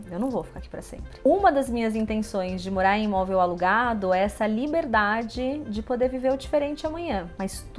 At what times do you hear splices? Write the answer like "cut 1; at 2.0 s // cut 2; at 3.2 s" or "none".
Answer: none